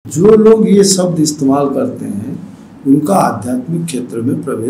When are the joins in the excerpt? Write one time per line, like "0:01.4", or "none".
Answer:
none

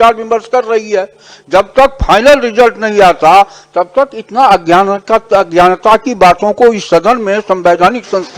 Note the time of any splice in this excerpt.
none

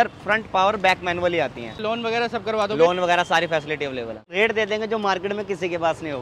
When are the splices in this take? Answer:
0:01.8
0:04.3

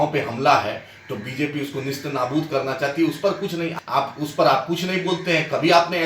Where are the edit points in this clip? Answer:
0:03.7

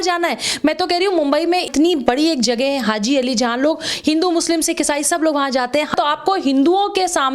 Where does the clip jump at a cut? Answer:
0:01.7
0:05.9

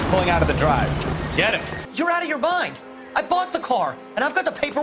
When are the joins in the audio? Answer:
0:01.8

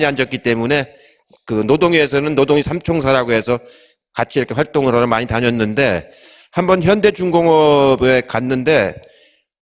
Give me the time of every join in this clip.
0:05.0

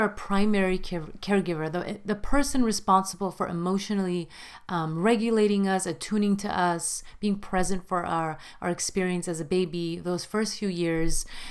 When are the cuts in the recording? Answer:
none

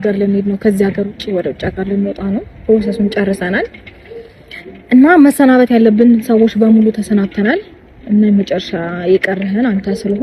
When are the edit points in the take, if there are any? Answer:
none

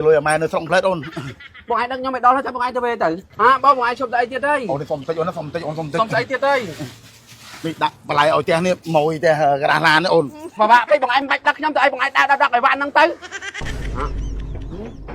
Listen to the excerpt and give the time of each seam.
0:03.3
0:10.5
0:13.3

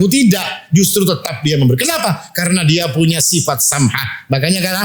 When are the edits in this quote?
none

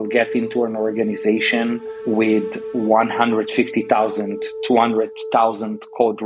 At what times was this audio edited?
none

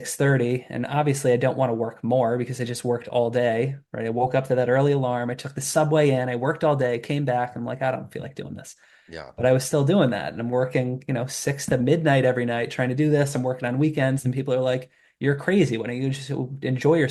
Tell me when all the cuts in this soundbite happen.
none

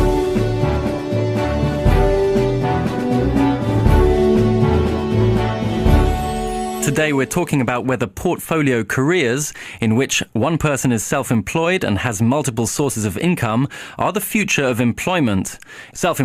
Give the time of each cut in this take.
none

